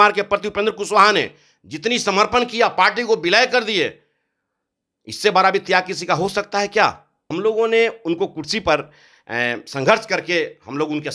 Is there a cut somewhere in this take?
yes; 1 cut; at 7.2 s

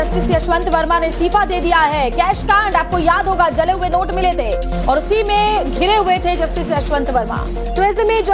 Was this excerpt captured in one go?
yes; 0 cuts

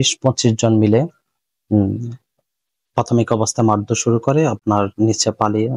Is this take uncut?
yes; 0 cuts

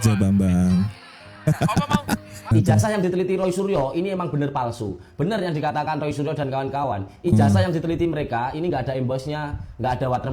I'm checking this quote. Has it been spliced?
yes; 1 cut; at 2.5 s

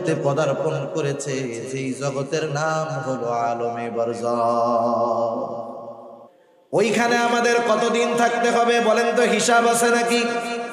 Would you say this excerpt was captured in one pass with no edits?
no; 1 cut; at 6.1 s

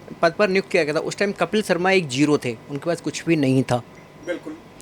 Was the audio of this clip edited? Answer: no; 0 cuts

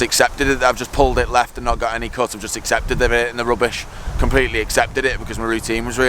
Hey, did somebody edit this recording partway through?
no; 0 cuts

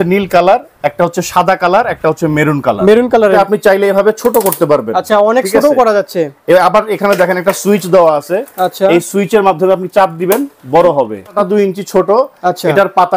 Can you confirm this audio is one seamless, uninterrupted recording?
no; 2 cuts; at 3.3 s, 11.3 s

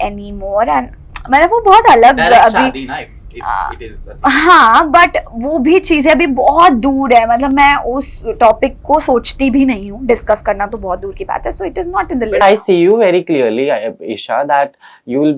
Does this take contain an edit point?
no; 0 cuts

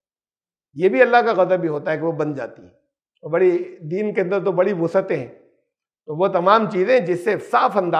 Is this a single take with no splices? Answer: yes; 0 cuts

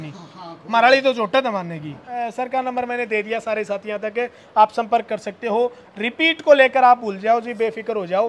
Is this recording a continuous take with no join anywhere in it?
no; 1 cut; at 2.2 s

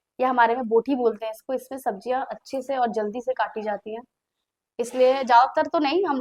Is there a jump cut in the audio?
no; 0 cuts

